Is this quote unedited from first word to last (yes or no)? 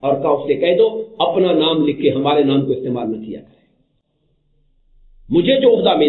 yes